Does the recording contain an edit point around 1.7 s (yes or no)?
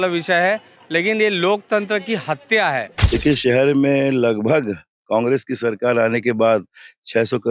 no